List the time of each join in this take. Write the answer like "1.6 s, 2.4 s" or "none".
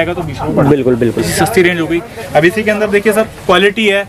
1.3 s

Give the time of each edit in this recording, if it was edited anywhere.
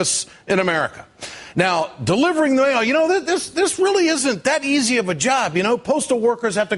5.4 s

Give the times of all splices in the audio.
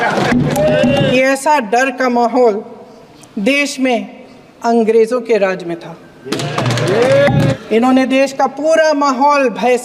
1.0 s, 7.5 s

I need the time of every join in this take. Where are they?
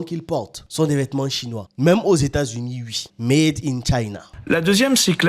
4.2 s

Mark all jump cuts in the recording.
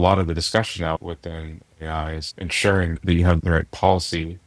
1.0 s

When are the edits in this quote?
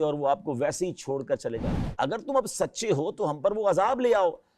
1.8 s

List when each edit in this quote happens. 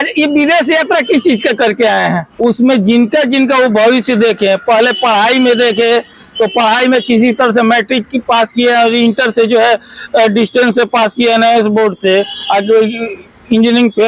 2.3 s

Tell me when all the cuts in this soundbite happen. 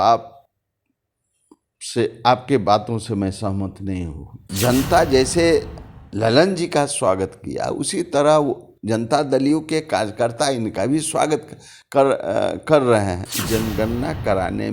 4.5 s, 13.3 s

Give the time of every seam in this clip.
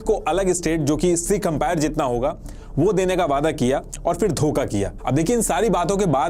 none

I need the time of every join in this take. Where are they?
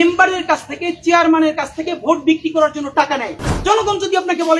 3.5 s

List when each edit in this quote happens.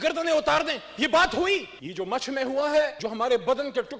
1.8 s, 3.0 s

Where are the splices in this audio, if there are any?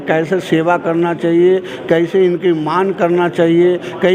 none

